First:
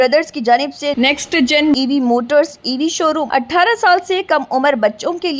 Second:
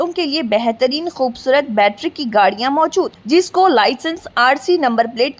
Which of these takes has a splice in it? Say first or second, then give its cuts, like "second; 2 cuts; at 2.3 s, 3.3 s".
first; 1 cut; at 3.2 s